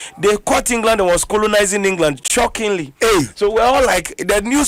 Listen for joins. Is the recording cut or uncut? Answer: uncut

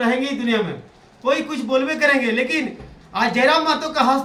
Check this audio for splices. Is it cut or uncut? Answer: uncut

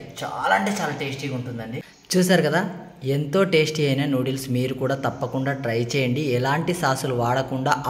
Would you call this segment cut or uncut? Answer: cut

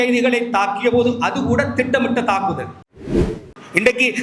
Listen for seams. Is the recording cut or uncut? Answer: uncut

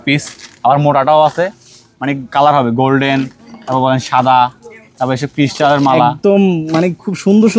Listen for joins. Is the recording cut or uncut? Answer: uncut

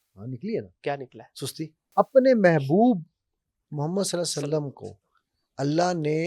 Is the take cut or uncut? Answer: cut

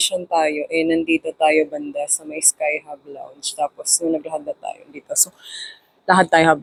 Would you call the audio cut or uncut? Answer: uncut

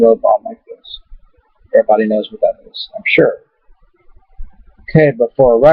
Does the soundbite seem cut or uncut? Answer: cut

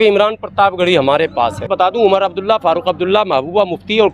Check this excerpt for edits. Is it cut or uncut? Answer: cut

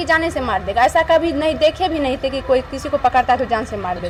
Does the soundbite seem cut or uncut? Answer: uncut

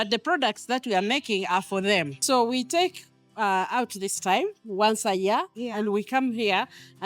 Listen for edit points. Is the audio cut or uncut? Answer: cut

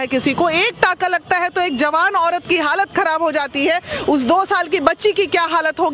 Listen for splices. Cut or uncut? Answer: uncut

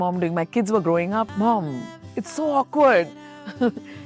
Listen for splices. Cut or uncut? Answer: cut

